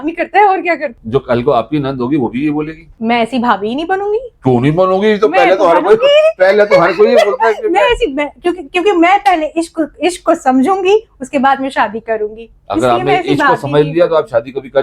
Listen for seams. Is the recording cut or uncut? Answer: cut